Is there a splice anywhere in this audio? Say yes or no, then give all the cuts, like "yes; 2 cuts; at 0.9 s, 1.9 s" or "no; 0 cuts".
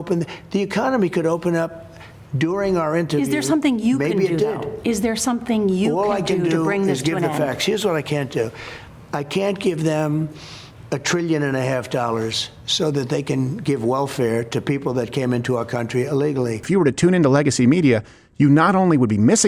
yes; 1 cut; at 16.7 s